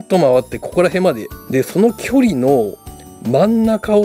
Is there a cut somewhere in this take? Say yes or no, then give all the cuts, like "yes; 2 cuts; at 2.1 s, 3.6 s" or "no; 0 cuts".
yes; 1 cut; at 1.3 s